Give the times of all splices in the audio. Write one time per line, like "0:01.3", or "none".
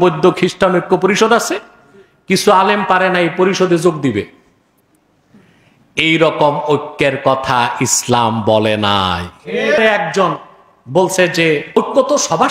0:09.8
0:11.8